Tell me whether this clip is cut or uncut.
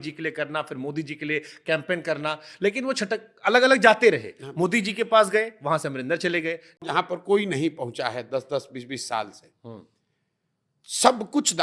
cut